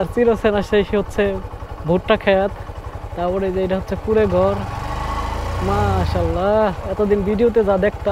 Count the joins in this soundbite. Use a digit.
0